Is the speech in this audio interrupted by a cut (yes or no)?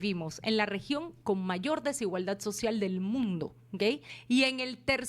yes